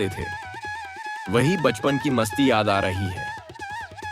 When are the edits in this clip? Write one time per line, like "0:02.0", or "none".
0:03.1